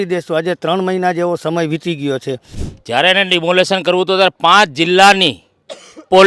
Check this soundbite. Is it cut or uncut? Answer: cut